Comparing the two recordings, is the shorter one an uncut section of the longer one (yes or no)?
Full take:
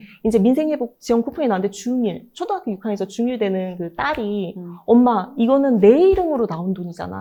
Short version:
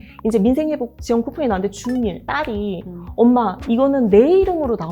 no